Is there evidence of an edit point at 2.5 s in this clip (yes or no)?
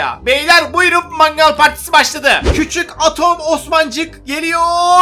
yes